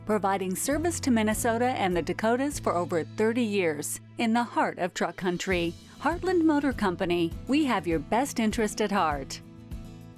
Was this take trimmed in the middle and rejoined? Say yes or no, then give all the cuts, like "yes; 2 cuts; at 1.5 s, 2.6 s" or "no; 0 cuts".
yes; 1 cut; at 9.3 s